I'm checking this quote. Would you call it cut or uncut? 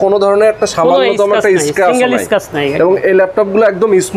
uncut